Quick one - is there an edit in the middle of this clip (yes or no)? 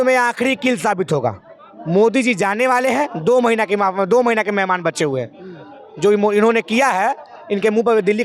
no